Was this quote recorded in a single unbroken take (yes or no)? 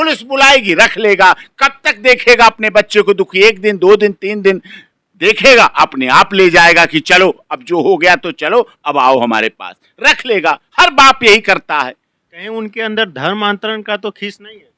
yes